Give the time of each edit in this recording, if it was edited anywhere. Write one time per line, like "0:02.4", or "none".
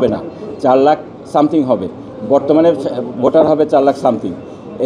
none